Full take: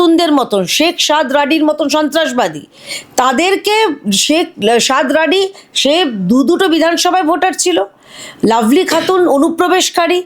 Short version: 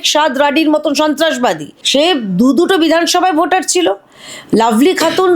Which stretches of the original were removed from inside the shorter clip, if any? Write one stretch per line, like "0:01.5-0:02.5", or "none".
0:02.7-0:05.7